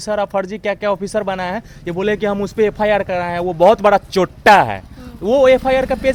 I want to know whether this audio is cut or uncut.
uncut